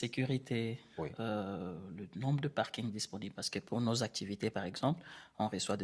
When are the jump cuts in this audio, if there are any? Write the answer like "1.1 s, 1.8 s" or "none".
none